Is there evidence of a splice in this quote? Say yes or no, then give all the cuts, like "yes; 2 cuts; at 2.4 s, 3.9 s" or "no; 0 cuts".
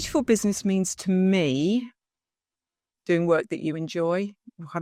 no; 0 cuts